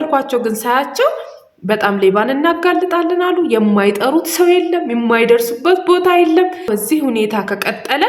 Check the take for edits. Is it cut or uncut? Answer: cut